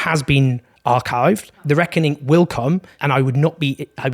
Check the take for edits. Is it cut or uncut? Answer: cut